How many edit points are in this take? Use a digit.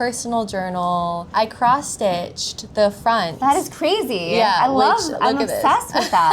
1